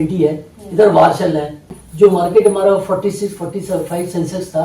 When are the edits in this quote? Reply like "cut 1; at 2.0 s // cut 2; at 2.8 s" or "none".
cut 1; at 2.0 s